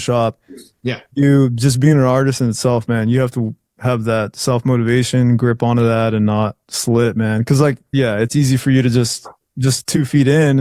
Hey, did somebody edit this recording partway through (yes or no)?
no